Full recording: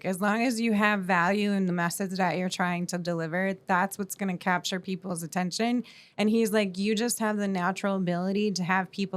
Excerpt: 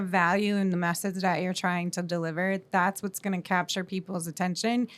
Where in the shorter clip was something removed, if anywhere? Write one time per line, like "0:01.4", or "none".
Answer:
none